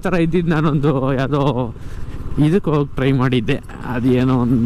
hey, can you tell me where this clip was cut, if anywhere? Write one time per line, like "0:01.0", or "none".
none